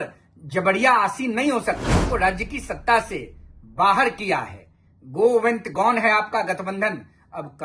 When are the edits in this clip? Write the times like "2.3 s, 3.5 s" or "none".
2.1 s